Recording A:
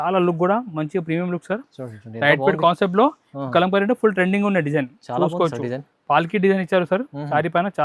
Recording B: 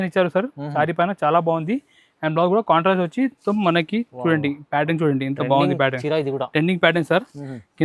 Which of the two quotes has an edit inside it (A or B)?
B